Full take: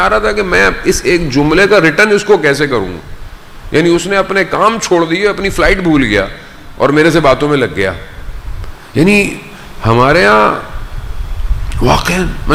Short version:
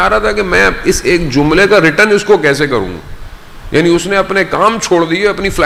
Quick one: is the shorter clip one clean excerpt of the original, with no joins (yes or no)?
yes